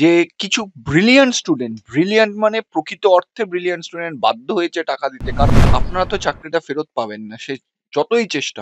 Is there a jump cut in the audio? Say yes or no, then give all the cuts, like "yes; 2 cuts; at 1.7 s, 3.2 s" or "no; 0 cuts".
yes; 1 cut; at 5.5 s